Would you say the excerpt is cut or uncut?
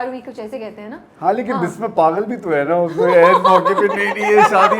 uncut